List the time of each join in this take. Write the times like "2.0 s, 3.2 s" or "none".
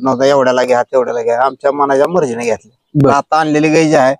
2.8 s